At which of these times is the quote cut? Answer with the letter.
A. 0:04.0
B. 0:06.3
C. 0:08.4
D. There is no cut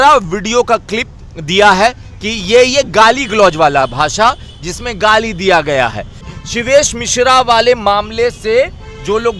B